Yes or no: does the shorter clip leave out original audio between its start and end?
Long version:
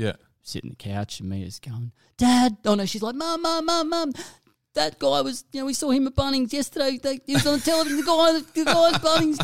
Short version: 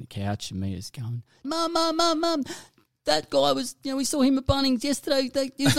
yes